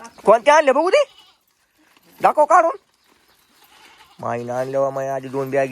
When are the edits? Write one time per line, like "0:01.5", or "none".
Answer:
none